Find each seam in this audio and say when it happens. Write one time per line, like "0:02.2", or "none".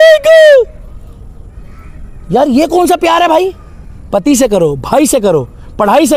none